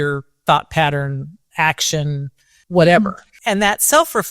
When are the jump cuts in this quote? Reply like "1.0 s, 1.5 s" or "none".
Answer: 2.6 s, 3.3 s